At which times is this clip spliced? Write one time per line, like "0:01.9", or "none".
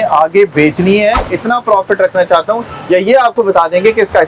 0:01.3